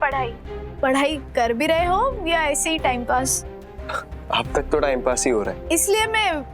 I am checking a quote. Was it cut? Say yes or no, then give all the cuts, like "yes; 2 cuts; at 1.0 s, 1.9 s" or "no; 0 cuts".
yes; 1 cut; at 5.6 s